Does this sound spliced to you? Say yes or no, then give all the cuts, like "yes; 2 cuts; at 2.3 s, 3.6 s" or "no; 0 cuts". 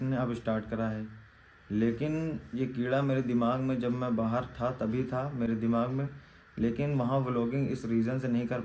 no; 0 cuts